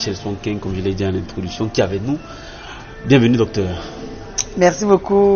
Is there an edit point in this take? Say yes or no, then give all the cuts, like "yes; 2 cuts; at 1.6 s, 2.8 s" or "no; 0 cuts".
no; 0 cuts